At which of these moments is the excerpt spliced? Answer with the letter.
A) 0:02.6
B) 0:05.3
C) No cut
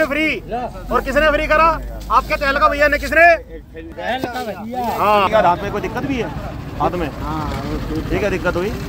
B